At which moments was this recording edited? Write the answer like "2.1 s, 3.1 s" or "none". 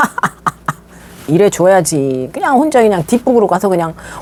none